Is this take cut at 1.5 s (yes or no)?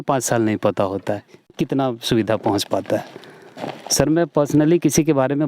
yes